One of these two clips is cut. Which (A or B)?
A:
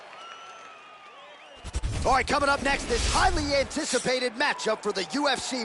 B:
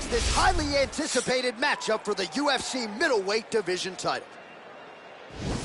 A